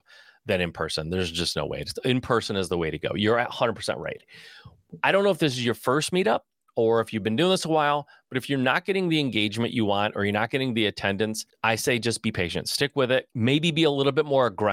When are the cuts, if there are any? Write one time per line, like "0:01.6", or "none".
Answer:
0:11.5
0:13.3